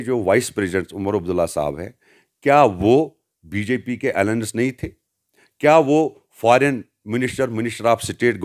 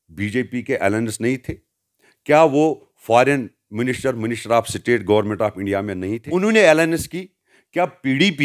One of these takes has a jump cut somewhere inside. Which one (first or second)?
second